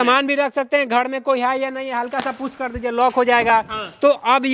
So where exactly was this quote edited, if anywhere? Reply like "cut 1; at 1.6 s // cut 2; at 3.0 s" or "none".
none

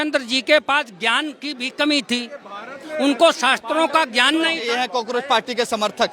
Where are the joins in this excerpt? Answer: none

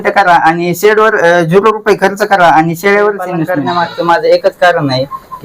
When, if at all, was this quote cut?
cut 1; at 3.4 s

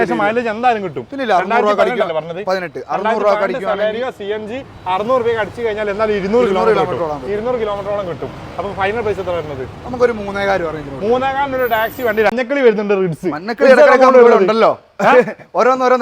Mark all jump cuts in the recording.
cut 1; at 12.3 s

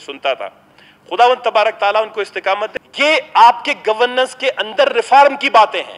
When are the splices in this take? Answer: cut 1; at 2.7 s

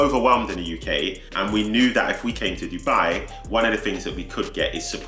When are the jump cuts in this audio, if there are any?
cut 1; at 2.4 s

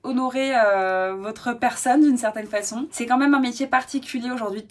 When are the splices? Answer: cut 1; at 2.9 s

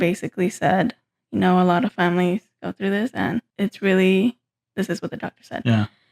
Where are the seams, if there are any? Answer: cut 1; at 3.5 s

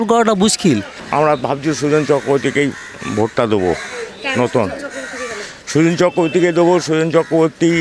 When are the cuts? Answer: cut 1; at 1.0 s

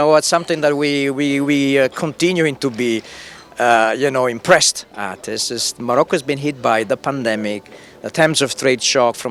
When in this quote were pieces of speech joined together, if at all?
none

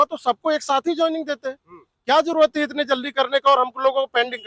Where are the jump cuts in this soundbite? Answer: none

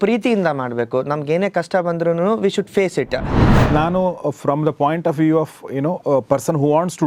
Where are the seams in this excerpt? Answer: cut 1; at 3.6 s

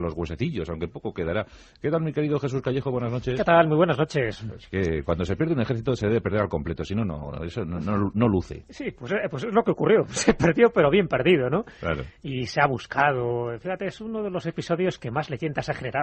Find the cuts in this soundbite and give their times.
cut 1; at 0.9 s

